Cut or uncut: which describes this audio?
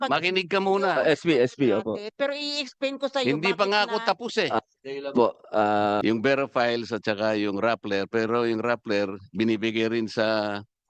cut